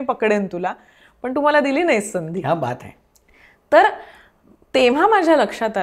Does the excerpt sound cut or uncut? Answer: uncut